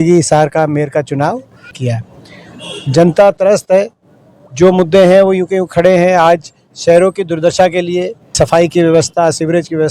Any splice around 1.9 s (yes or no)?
yes